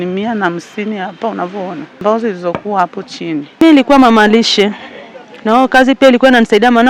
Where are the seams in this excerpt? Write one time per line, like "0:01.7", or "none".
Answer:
0:02.0
0:03.5